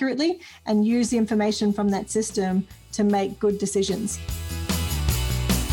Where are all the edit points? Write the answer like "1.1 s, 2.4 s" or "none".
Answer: 4.3 s